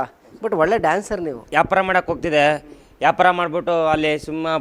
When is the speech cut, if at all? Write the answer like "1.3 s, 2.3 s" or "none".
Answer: 1.4 s